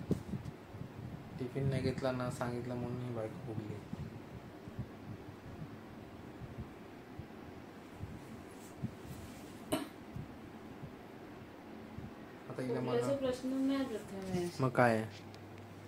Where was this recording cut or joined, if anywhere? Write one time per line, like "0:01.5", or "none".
none